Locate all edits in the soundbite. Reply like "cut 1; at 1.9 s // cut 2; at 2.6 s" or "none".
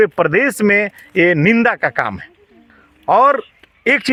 none